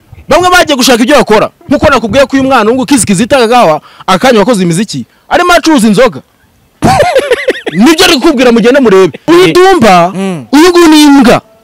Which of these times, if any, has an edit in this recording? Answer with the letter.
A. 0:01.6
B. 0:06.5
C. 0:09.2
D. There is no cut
C